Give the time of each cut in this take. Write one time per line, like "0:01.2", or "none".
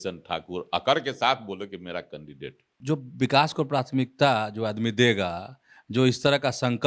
0:02.7